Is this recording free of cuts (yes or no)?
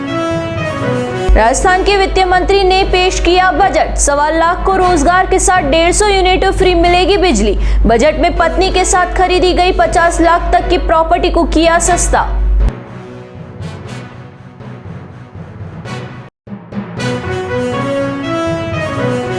no